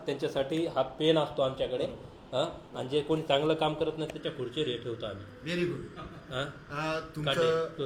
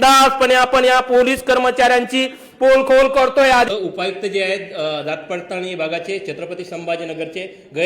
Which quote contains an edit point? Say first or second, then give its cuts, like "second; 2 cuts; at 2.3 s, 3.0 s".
second; 1 cut; at 3.7 s